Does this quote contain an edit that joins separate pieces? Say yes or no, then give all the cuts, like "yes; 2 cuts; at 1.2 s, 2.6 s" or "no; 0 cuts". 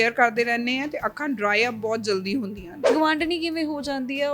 yes; 1 cut; at 2.9 s